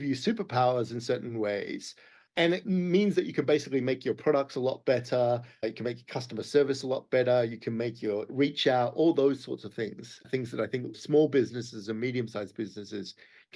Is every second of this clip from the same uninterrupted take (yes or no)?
no